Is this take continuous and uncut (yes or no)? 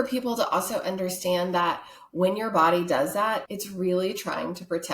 no